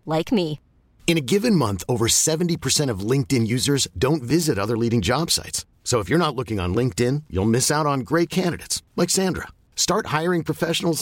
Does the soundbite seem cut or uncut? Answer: uncut